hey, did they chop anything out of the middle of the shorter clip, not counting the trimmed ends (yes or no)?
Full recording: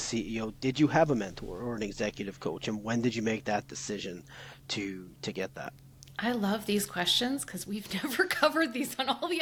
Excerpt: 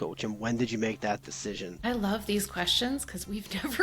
yes